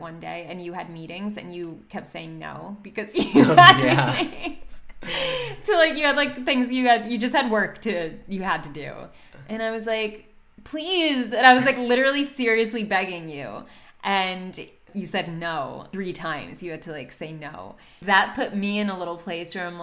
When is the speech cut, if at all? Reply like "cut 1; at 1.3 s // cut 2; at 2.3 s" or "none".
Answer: cut 1; at 14.9 s // cut 2; at 15.9 s // cut 3; at 17.9 s